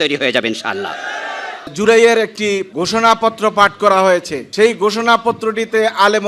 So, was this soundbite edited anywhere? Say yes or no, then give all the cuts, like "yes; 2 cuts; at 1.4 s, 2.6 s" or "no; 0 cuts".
yes; 3 cuts; at 1.7 s, 2.7 s, 4.4 s